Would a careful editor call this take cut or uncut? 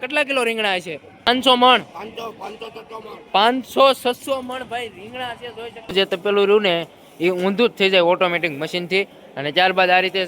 cut